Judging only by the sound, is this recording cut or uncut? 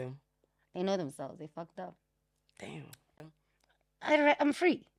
cut